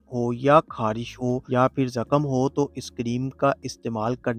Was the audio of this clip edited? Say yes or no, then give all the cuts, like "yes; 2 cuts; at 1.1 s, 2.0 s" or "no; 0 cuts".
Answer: no; 0 cuts